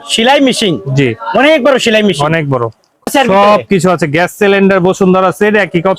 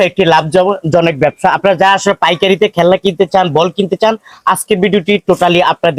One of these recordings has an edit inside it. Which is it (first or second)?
first